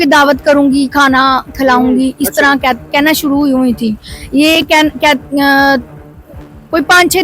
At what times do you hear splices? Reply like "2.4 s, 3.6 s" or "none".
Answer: none

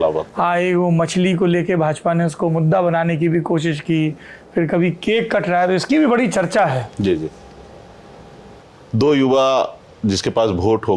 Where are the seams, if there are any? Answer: none

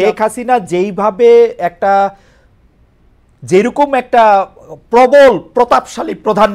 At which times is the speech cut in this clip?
none

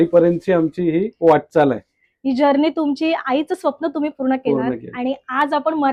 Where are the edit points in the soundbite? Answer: none

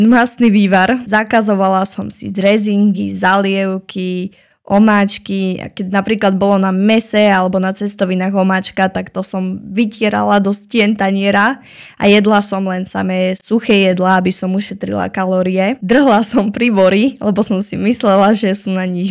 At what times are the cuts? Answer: none

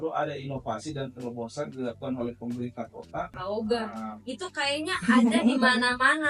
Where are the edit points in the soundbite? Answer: 3.4 s

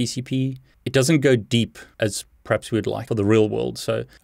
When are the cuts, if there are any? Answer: 1.8 s, 3.0 s

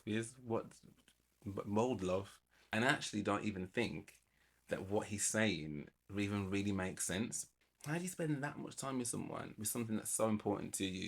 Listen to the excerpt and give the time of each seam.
2.7 s, 7.5 s

